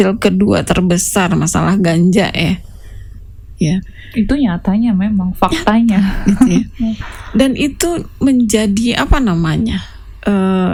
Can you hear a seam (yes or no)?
no